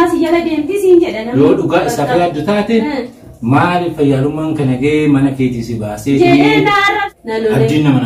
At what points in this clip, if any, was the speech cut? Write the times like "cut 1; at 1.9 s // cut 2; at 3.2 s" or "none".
cut 1; at 7.0 s